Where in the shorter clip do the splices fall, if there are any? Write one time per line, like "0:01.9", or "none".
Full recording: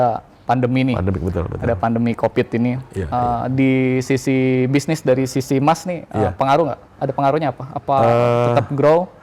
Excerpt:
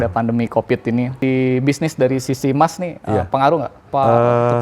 0:01.2
0:03.8

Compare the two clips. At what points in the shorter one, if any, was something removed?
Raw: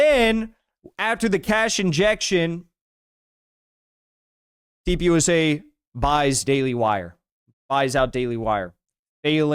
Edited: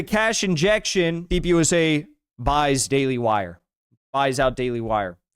0:01.2

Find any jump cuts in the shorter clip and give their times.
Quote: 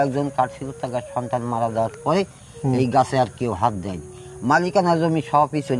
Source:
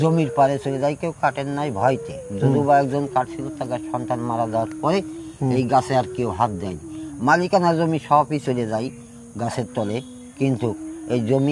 none

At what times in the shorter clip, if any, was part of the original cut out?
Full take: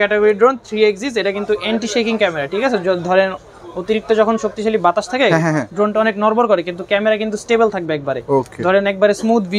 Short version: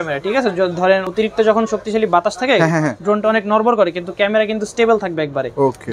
0:01.1

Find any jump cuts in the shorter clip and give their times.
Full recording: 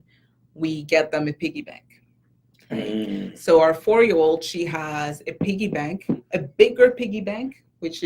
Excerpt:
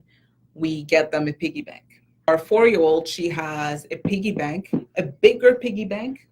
0:02.3

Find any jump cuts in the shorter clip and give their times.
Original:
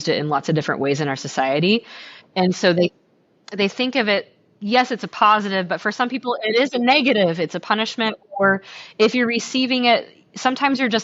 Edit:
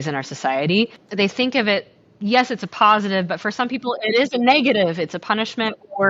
0:01.0

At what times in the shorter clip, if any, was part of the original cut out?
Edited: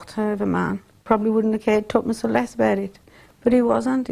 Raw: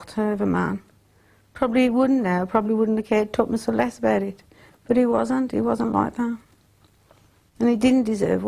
0:01.0

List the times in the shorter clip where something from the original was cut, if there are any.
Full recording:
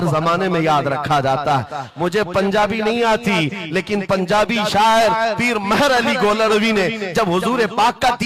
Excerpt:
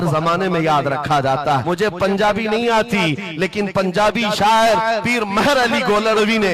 0:01.6

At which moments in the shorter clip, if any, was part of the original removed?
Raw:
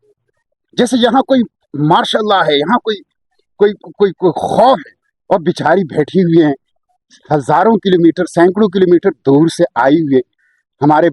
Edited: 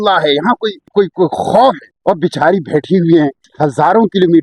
0:00.8
0:01.9
0:03.4

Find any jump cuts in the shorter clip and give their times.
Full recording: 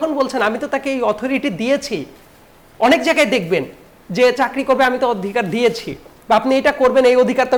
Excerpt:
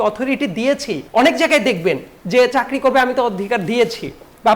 0:01.0
0:02.1

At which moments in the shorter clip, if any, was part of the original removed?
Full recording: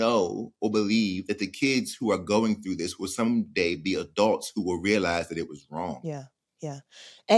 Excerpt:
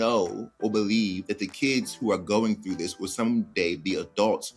none

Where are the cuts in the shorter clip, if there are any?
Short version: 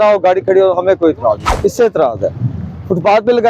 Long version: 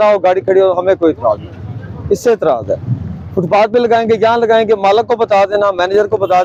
0:01.5

